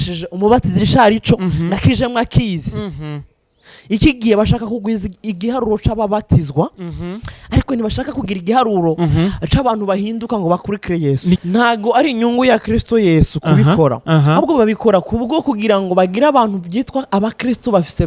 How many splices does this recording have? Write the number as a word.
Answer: one